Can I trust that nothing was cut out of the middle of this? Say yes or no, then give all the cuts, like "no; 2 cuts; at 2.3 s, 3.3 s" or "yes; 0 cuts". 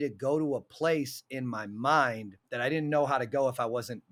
yes; 0 cuts